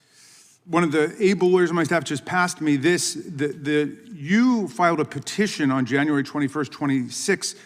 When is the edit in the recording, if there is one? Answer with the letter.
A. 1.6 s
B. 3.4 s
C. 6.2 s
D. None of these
D